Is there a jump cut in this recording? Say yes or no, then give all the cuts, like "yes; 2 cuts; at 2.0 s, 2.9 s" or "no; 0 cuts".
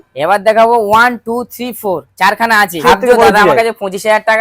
yes; 1 cut; at 2.8 s